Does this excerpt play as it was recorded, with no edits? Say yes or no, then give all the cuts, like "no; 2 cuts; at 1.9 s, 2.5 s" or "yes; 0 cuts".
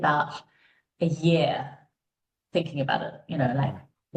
yes; 0 cuts